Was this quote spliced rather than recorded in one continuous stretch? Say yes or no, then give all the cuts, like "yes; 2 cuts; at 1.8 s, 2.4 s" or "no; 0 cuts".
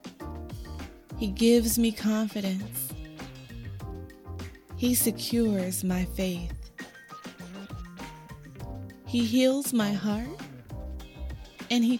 yes; 4 cuts; at 2.7 s, 4.4 s, 6.5 s, 8.4 s